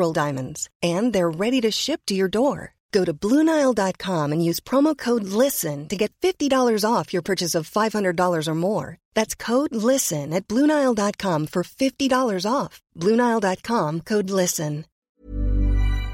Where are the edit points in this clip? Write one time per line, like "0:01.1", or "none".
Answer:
0:15.1